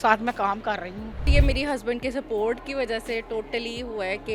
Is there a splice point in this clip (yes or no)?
yes